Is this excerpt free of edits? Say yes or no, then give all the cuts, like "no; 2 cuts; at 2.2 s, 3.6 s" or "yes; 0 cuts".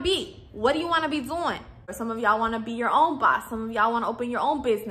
no; 1 cut; at 1.9 s